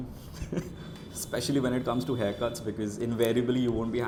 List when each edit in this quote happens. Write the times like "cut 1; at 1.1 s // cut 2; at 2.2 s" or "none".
none